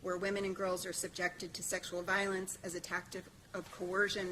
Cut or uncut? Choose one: uncut